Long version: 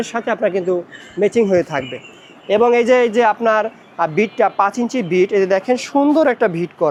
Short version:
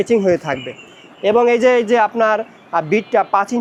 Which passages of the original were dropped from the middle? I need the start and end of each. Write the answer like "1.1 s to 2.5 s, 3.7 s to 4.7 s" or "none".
none